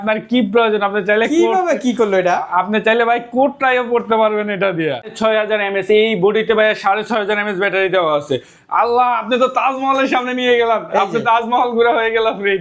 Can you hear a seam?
yes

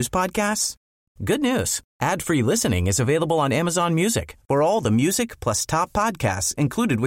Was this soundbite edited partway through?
no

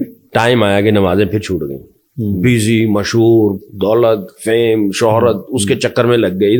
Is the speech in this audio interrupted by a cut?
no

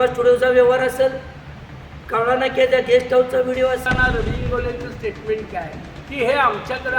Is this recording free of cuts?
no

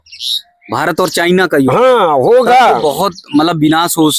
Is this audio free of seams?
yes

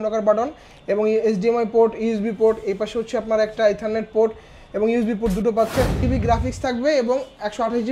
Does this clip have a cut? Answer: yes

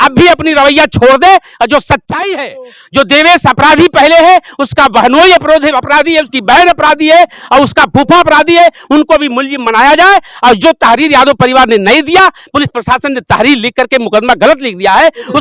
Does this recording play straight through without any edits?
yes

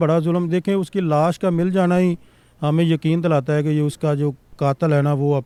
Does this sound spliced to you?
no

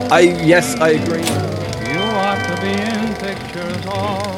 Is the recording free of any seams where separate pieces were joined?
no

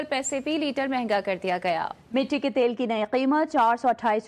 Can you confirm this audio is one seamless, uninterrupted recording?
yes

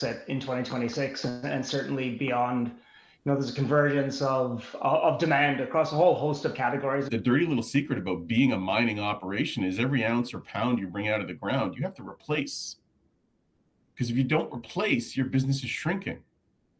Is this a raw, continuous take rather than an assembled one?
no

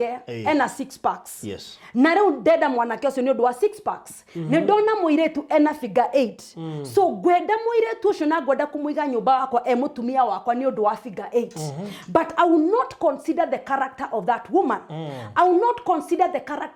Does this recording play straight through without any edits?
yes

